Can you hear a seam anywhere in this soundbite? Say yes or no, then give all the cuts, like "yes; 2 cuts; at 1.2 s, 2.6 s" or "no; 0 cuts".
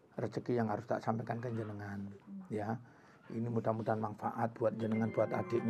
no; 0 cuts